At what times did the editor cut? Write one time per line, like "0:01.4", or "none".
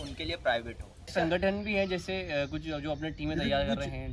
0:01.1